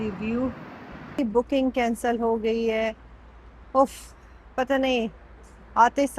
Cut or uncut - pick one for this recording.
cut